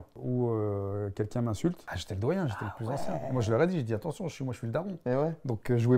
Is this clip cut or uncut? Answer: cut